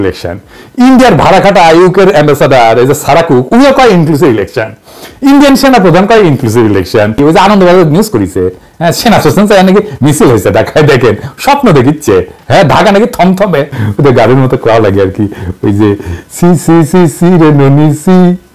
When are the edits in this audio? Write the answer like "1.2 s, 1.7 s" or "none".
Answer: 7.2 s, 13.8 s